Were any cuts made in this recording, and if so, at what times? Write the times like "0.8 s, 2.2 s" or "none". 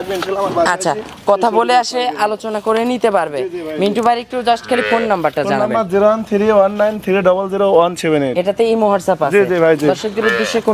4.1 s